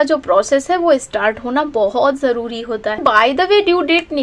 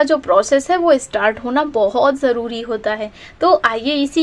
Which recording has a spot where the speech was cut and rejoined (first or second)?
first